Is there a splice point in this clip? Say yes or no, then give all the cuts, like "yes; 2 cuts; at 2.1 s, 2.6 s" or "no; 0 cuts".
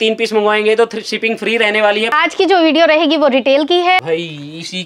yes; 2 cuts; at 2.1 s, 4.0 s